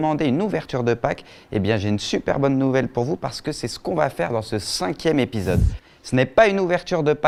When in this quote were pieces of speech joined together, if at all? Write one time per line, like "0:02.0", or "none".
none

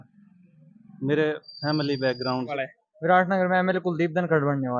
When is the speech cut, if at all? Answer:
0:02.5

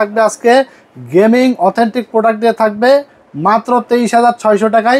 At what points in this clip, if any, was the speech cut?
none

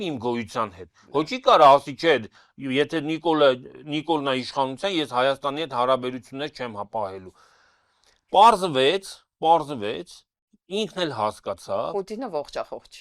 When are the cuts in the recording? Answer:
none

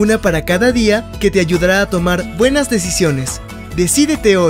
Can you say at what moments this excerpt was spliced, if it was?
0:03.4

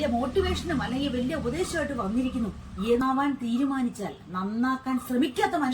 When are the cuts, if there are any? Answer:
0:03.0

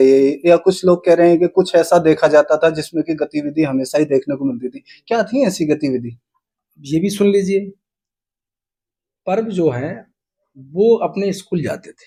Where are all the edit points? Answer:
none

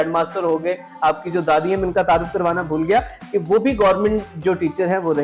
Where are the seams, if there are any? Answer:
none

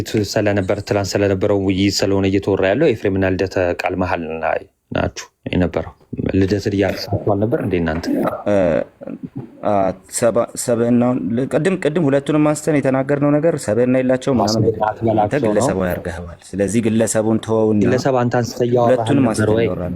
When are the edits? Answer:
none

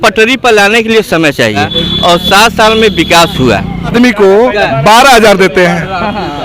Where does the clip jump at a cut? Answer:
0:01.8
0:03.9

